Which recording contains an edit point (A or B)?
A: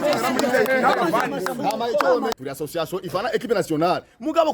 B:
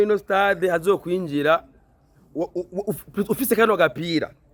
A